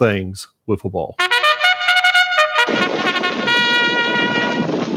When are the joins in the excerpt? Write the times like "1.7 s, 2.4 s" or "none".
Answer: 1.1 s